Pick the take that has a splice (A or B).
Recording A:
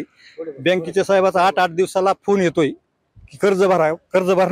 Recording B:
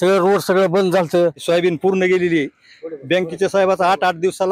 B